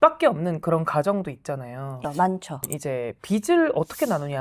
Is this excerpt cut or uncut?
cut